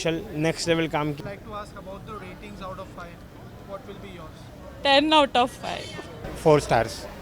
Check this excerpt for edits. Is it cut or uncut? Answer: uncut